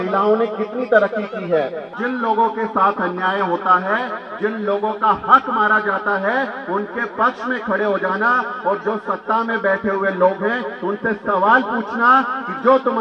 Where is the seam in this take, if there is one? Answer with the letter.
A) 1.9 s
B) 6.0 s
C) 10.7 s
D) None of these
A